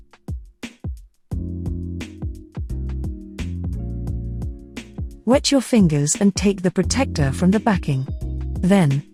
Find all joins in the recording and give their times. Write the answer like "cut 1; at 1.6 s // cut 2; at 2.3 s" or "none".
none